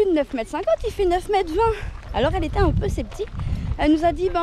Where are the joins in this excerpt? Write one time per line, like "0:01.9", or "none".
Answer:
none